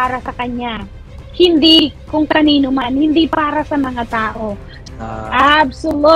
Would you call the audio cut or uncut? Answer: cut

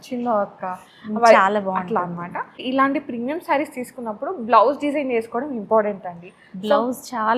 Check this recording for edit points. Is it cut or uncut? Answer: cut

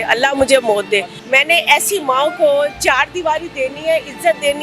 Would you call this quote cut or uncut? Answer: cut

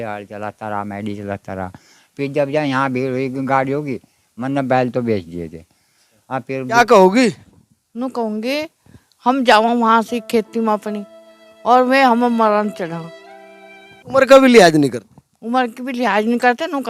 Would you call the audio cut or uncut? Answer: cut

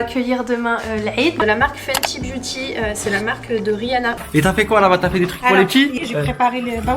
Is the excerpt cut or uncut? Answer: cut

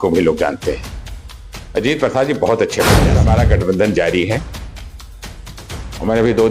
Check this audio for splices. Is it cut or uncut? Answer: cut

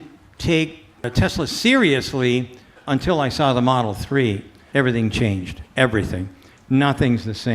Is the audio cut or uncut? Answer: cut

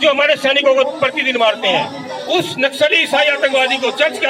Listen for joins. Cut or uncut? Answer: cut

